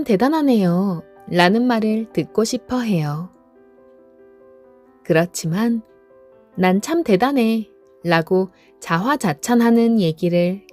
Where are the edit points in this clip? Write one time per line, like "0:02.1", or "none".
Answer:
none